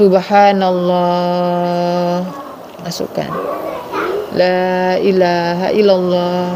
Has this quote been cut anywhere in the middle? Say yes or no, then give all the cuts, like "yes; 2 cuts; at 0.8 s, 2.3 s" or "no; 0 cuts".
no; 0 cuts